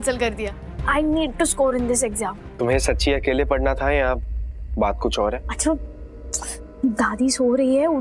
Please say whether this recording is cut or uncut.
cut